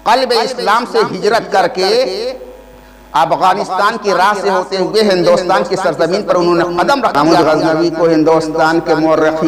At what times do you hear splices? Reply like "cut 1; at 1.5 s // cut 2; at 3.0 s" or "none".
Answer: cut 1; at 7.1 s